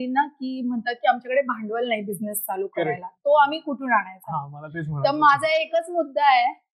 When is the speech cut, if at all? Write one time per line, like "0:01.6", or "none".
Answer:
none